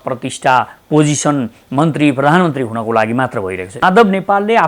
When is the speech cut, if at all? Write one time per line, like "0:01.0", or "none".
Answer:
0:03.7